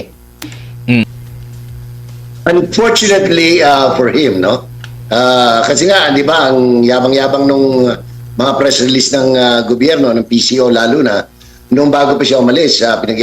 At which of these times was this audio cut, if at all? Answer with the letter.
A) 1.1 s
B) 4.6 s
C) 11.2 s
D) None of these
A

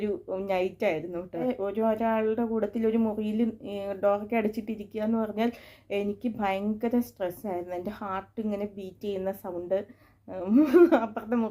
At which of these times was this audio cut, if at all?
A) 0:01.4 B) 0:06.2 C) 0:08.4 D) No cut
A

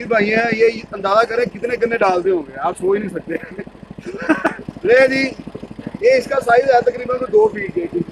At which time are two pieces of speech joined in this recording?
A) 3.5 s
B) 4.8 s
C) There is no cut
B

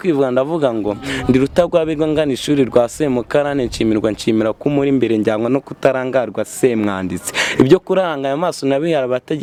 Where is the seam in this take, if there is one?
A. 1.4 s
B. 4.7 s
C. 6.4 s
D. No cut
D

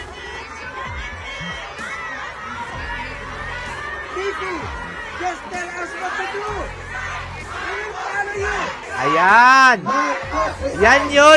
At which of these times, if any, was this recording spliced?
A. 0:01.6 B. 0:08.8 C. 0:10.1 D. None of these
B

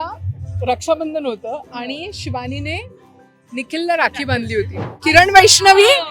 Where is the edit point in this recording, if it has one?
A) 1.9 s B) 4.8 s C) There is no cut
B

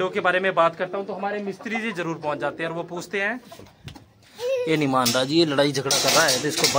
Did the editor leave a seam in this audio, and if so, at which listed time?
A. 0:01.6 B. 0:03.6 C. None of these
B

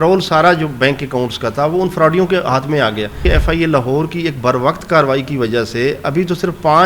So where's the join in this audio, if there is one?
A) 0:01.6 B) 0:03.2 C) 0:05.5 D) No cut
B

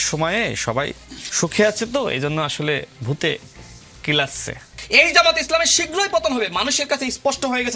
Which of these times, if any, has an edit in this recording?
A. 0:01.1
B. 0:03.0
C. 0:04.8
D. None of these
C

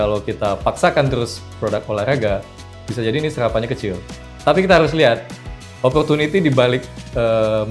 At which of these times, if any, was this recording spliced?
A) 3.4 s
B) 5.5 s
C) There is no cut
C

